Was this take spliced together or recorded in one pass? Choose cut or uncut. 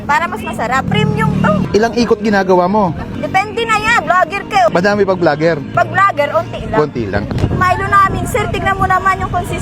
cut